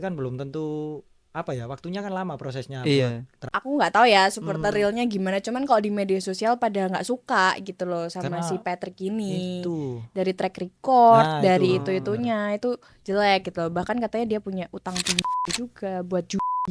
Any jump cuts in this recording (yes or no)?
yes